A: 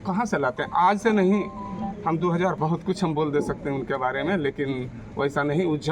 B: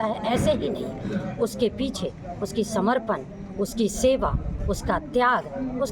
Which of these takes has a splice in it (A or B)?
A